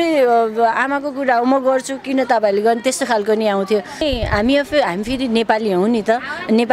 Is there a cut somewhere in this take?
yes; 1 cut; at 4.0 s

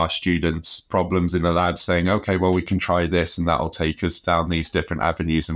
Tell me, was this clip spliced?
no; 0 cuts

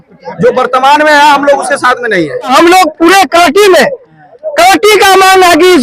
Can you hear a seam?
yes; 1 cut; at 2.5 s

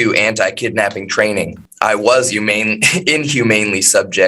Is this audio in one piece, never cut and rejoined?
no; 1 cut; at 1.6 s

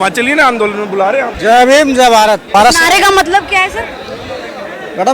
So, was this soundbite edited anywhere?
yes; 2 cuts; at 1.3 s, 2.5 s

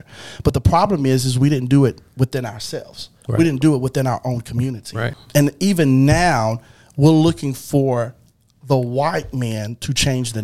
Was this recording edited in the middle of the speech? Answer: yes; 1 cut; at 5.2 s

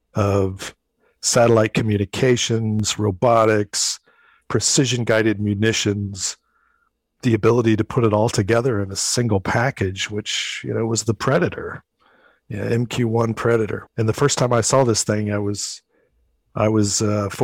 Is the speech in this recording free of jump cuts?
no; 1 cut; at 13.9 s

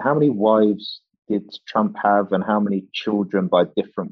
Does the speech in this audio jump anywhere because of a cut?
no; 0 cuts

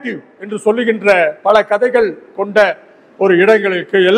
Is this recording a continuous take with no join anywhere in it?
yes; 0 cuts

